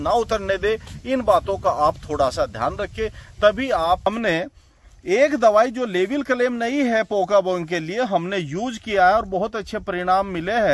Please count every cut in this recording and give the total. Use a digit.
1